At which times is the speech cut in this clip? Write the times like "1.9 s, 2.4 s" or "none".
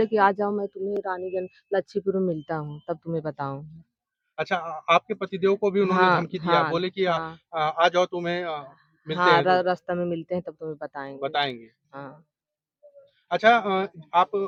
none